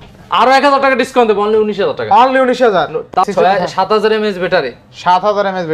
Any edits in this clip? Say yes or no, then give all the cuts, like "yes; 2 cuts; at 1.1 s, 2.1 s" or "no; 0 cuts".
yes; 1 cut; at 3.2 s